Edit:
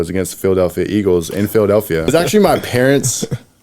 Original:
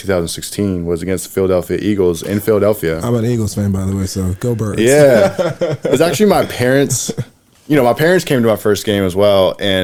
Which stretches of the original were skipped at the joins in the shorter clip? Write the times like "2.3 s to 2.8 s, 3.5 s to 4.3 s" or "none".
3.0 s to 6.0 s

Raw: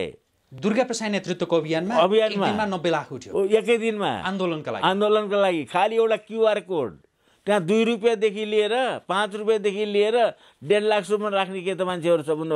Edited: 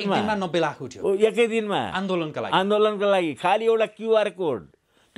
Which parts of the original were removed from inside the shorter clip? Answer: none

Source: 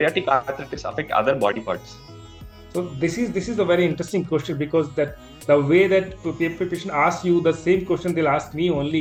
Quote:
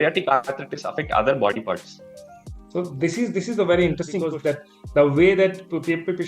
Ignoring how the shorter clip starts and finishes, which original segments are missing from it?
4.2 s to 4.8 s

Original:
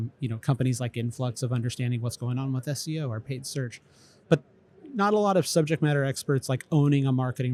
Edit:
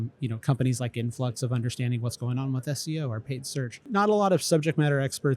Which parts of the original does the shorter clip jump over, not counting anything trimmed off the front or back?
3.8 s to 4.8 s

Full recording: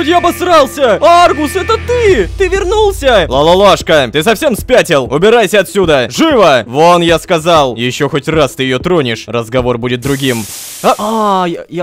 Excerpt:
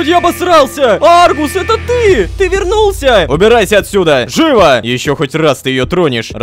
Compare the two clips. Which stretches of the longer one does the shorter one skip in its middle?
3.3 s to 5.1 s, 6.7 s to 7.8 s

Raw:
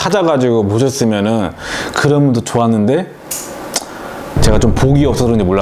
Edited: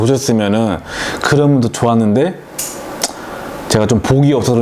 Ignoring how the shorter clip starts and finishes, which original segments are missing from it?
none

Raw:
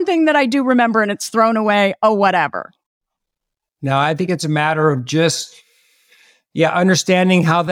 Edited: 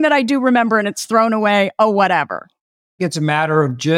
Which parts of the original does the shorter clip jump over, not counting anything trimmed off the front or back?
3.2 s to 4.3 s

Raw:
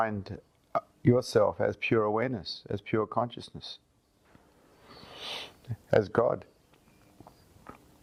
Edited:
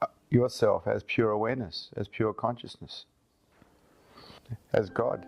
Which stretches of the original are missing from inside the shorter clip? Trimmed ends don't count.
5.1 s to 5.6 s

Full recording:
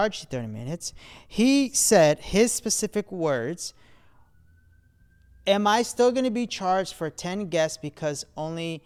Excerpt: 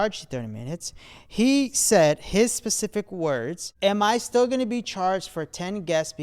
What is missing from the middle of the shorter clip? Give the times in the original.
3.6 s to 5.3 s

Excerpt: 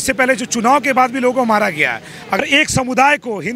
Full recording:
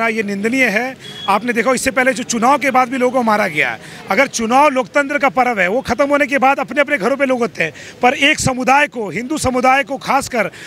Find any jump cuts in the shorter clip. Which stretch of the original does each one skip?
4.2 s to 8.1 s

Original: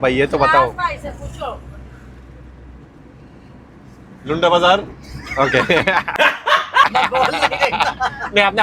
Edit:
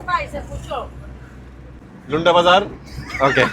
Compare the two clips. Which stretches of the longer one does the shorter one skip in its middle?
2.5 s to 3.9 s

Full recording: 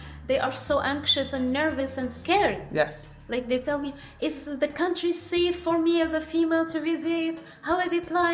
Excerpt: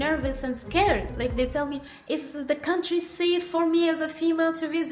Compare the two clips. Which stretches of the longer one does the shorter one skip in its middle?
2.6 s to 3.2 s

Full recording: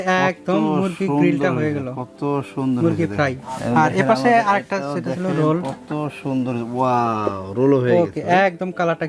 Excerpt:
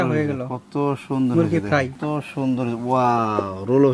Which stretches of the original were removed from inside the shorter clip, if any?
3.4 s to 5.8 s

